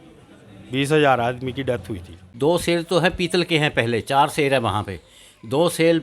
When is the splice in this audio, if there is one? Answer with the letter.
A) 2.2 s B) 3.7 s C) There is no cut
A